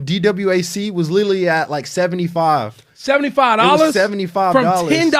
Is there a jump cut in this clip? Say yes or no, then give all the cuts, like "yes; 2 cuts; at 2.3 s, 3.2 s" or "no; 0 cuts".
no; 0 cuts